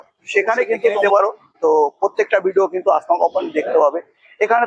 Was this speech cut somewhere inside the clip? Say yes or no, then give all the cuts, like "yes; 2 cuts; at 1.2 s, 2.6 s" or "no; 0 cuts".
yes; 1 cut; at 1.0 s